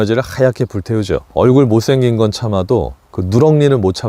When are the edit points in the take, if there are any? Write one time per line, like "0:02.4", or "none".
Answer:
0:01.2